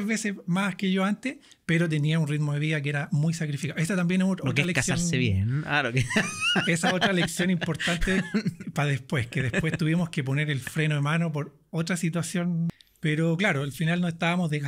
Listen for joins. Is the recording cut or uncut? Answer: cut